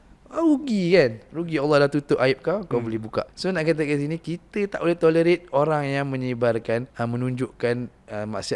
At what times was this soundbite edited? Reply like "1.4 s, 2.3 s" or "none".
3.3 s, 6.9 s